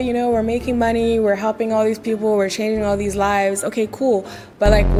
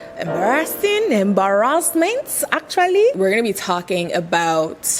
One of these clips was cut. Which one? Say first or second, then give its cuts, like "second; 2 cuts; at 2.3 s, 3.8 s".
second; 1 cut; at 3.2 s